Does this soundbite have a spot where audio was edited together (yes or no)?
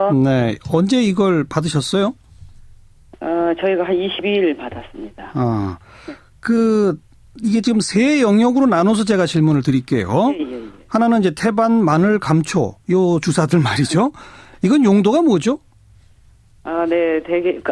yes